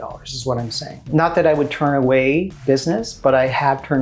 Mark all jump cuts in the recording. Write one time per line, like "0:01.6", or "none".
0:00.9

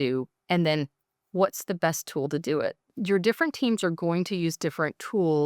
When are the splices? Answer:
0:02.9

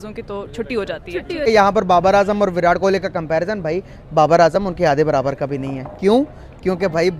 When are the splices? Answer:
0:01.5

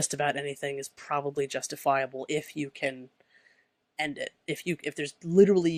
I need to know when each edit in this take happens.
none

